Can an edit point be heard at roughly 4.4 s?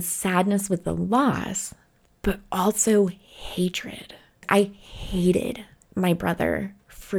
yes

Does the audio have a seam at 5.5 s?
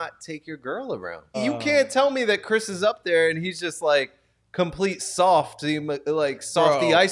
no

